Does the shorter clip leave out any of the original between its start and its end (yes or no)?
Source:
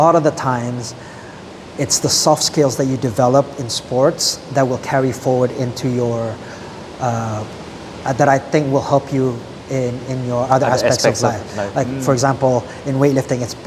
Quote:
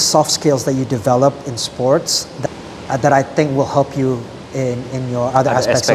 yes